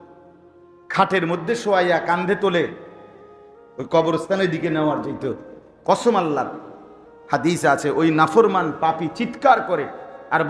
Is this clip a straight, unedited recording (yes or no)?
yes